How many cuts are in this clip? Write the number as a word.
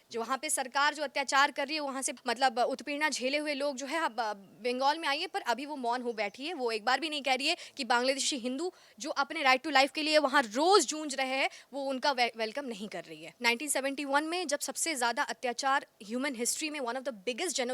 two